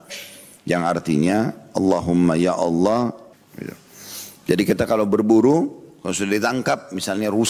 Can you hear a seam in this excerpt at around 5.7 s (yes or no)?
no